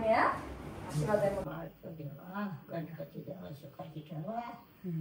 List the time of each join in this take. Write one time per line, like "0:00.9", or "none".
0:01.4